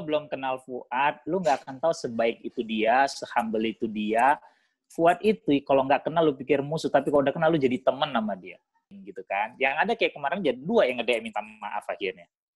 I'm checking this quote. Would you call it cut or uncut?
cut